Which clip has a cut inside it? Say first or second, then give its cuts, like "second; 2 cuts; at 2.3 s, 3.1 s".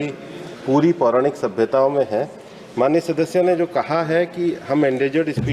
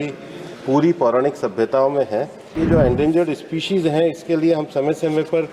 second; 1 cut; at 2.5 s